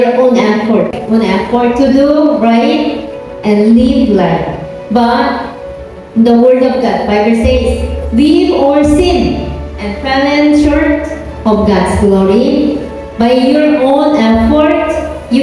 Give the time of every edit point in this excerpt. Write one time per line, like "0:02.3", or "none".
0:00.9